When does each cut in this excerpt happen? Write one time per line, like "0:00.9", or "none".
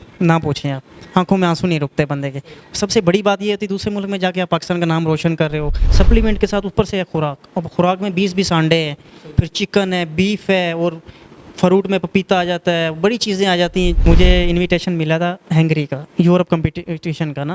0:05.8
0:14.1